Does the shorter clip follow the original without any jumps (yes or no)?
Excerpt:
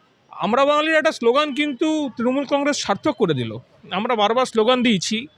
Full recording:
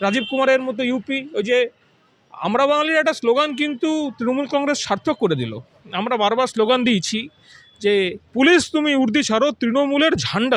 yes